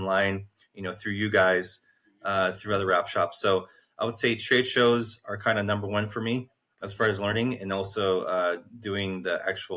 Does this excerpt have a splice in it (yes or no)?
no